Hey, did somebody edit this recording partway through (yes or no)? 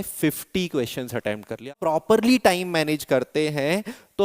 yes